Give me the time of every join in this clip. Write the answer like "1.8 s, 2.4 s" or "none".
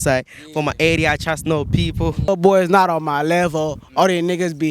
2.3 s